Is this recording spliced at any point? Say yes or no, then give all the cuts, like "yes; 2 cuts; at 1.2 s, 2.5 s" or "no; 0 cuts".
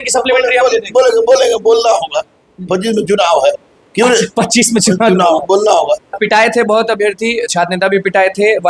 yes; 1 cut; at 6.2 s